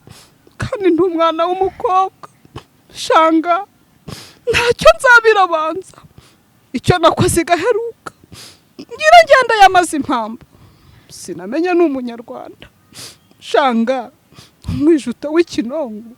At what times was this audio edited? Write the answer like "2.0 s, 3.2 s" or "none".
none